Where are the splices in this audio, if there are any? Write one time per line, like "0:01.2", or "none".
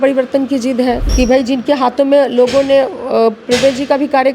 0:01.1